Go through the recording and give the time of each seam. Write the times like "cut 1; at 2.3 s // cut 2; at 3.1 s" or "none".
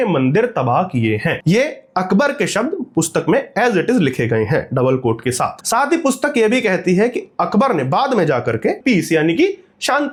none